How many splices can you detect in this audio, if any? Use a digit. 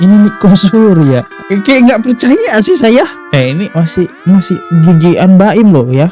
0